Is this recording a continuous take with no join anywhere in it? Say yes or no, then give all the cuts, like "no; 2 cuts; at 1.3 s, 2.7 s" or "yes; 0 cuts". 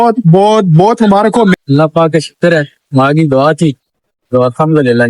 no; 1 cut; at 1.6 s